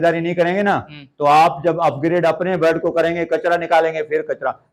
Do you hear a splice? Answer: no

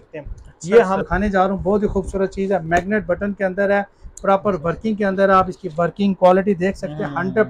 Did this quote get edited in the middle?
yes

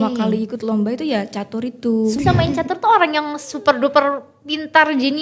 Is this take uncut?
no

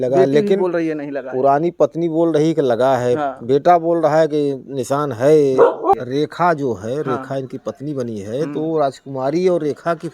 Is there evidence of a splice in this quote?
yes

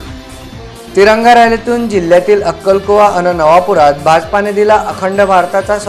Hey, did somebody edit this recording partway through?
no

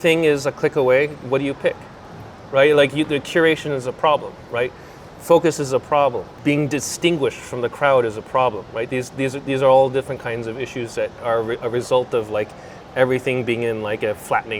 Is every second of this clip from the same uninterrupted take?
yes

